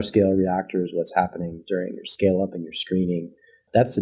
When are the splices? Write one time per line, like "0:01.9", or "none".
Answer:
none